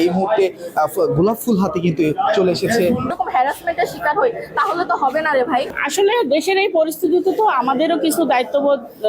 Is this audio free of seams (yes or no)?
no